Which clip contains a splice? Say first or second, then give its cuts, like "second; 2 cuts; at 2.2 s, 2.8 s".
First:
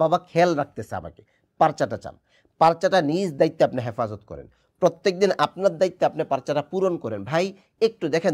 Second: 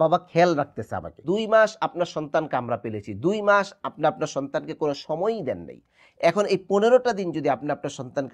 second; 1 cut; at 1.2 s